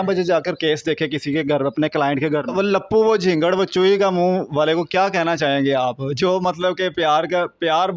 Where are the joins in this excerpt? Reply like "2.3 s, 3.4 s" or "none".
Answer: 2.4 s